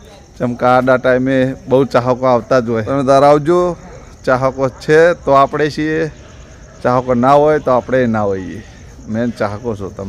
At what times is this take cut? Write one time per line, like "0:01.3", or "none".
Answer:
0:02.9